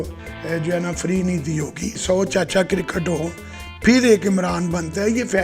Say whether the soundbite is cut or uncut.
cut